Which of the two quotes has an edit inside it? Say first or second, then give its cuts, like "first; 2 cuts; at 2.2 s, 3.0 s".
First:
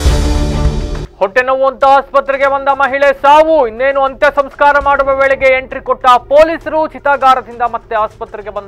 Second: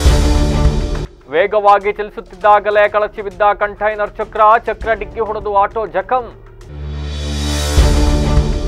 first; 1 cut; at 1.0 s